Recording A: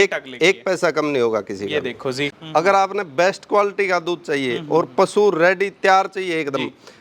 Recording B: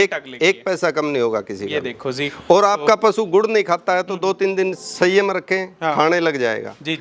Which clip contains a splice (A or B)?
A